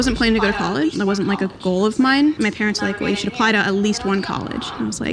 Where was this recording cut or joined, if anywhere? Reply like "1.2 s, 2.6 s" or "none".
0.9 s